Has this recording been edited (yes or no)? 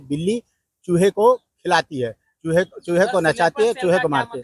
no